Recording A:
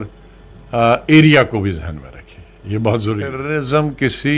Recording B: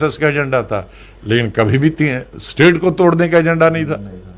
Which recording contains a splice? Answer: A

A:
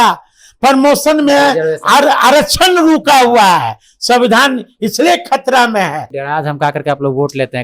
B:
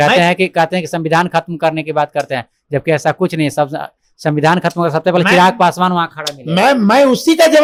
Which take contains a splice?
A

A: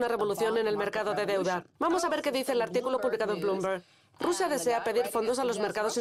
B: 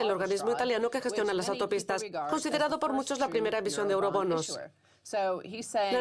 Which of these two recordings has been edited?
B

